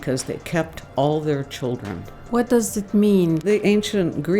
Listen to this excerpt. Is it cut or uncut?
cut